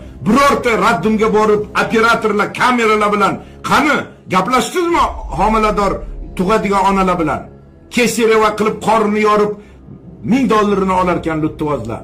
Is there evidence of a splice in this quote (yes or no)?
no